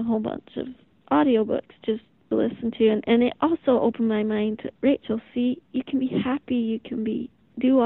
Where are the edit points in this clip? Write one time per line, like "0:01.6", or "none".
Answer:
0:02.2